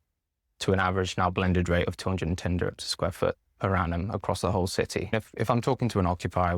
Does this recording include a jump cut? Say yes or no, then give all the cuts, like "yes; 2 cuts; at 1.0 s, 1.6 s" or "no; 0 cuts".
yes; 1 cut; at 5.1 s